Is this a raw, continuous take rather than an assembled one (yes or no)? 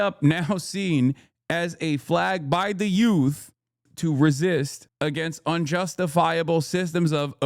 no